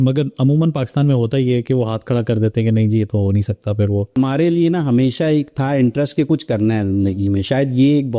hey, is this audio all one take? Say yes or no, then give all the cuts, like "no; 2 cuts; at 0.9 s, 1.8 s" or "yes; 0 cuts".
no; 1 cut; at 4.1 s